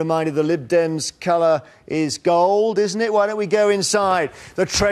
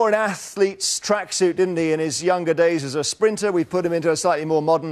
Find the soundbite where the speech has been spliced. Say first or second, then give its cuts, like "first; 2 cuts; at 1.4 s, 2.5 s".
second; 1 cut; at 1.9 s